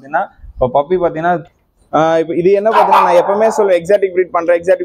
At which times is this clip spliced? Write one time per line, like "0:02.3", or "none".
0:01.4